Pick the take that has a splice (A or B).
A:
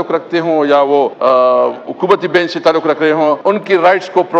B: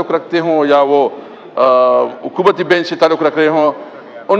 A